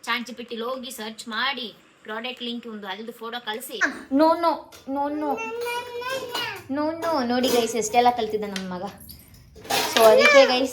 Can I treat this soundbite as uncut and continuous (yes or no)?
no